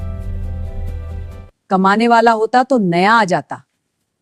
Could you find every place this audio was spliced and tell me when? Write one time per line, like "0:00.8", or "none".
0:01.2